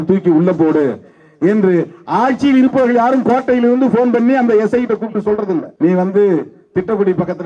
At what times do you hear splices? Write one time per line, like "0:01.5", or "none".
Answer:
0:05.7